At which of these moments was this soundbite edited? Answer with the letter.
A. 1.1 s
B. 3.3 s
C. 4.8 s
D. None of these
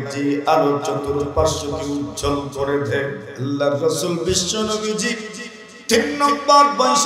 B